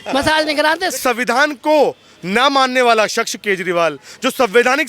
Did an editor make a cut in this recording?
yes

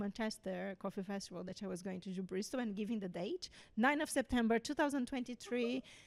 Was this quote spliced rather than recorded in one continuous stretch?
no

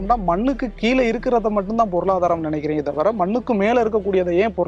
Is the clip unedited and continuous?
yes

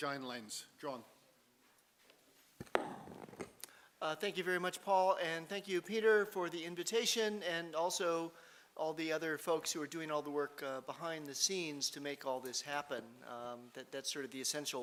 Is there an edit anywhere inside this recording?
no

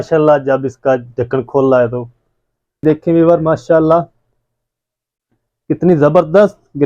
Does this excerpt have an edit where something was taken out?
yes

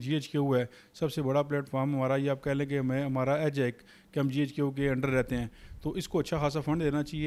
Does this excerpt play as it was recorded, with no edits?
yes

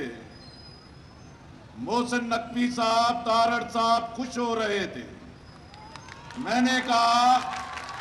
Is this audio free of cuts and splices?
yes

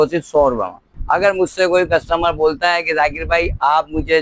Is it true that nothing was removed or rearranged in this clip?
no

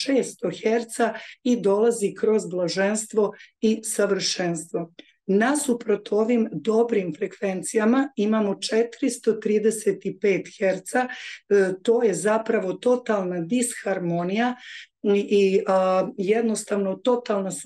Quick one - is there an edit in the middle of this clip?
no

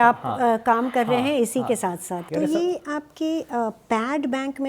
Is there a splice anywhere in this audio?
yes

